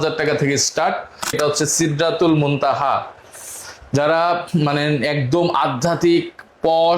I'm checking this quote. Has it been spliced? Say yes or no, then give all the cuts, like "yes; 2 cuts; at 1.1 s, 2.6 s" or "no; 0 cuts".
yes; 1 cut; at 1.4 s